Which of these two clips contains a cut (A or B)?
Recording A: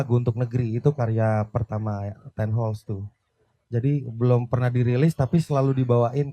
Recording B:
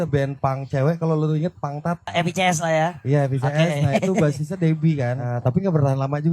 B